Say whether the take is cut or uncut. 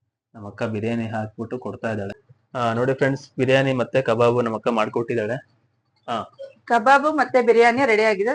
cut